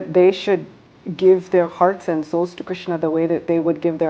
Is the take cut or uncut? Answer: uncut